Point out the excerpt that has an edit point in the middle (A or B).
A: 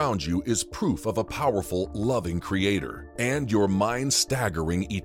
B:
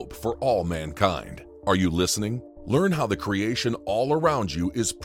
B